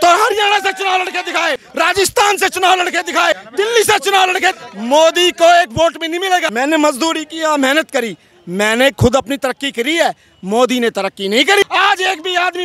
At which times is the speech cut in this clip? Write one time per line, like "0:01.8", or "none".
0:01.6
0:03.4
0:04.6
0:06.5
0:11.6